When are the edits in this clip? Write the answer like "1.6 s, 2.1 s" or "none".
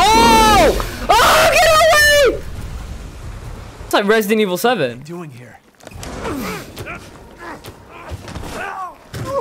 3.9 s